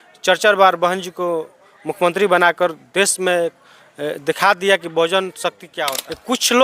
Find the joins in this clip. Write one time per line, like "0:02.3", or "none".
0:05.7